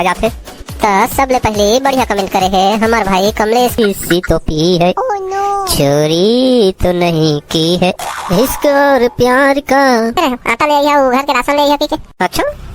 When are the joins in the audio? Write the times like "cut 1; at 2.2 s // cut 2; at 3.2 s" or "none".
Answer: cut 1; at 3.8 s // cut 2; at 10.2 s